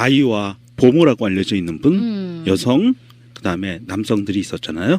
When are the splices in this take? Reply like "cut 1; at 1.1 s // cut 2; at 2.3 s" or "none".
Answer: cut 1; at 1.0 s